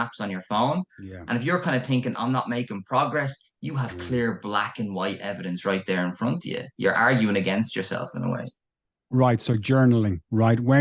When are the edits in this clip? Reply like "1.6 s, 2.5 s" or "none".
none